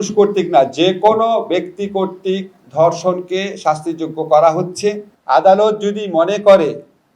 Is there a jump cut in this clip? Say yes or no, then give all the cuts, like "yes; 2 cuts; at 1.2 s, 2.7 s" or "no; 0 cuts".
yes; 1 cut; at 5.1 s